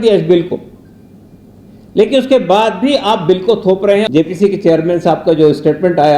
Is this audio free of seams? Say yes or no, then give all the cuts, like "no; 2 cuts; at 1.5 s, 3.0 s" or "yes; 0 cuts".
no; 1 cut; at 4.1 s